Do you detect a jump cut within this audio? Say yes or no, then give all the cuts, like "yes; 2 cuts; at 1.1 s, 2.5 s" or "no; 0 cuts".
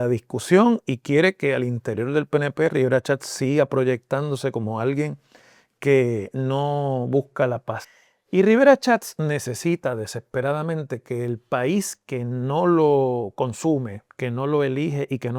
yes; 1 cut; at 7.8 s